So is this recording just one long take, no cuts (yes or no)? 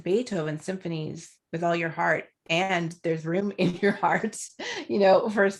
yes